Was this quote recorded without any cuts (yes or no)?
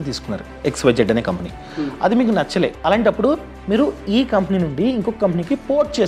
no